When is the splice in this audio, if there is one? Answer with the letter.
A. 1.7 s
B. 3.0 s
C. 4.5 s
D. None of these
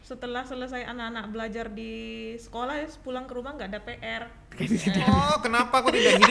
C